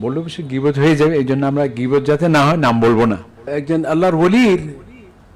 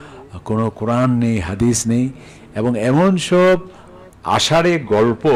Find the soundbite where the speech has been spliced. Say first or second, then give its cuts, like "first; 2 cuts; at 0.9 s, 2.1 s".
first; 1 cut; at 3.5 s